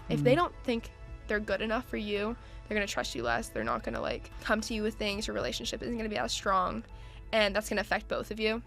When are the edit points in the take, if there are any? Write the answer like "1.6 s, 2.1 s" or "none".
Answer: 4.3 s